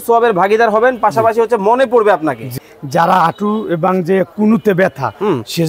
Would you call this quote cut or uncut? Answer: cut